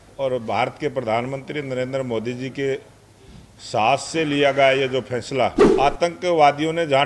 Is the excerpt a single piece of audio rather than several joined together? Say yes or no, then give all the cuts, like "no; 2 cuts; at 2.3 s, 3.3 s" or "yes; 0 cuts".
no; 1 cut; at 5.6 s